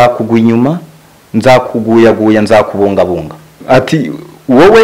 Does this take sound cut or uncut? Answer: cut